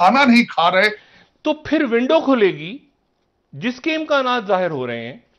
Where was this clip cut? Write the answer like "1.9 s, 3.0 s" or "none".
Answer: 1.0 s